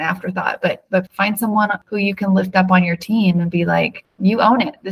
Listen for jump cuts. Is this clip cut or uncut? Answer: cut